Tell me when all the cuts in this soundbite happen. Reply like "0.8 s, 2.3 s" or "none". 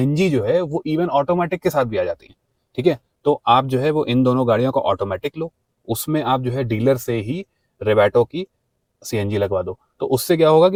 none